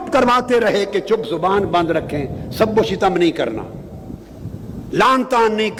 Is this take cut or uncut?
uncut